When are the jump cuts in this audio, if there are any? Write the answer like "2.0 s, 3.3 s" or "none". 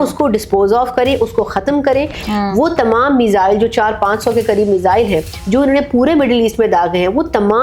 2.2 s